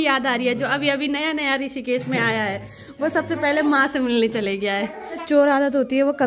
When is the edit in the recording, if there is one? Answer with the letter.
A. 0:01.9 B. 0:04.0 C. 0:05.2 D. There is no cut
C